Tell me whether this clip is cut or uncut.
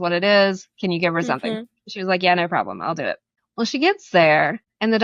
uncut